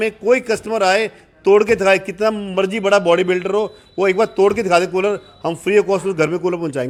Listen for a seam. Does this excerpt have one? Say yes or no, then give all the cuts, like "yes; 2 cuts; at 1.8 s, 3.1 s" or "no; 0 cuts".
no; 0 cuts